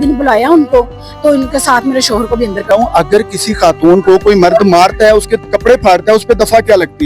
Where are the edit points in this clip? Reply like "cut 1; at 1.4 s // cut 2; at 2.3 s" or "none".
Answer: cut 1; at 2.7 s